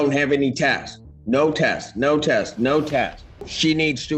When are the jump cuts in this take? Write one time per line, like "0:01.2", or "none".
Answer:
0:03.3